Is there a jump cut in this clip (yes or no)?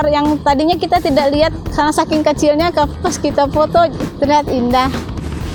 no